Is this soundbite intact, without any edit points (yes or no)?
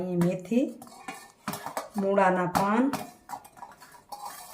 yes